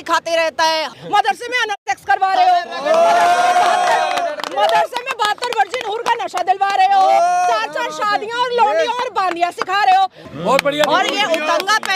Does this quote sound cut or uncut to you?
cut